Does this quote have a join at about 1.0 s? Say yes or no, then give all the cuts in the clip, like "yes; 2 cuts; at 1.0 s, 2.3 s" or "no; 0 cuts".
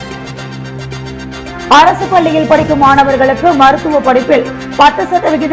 yes; 1 cut; at 1.0 s